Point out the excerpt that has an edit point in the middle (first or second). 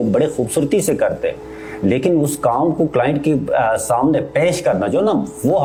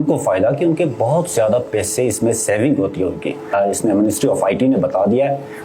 second